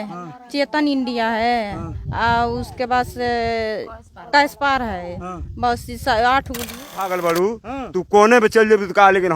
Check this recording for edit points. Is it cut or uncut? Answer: cut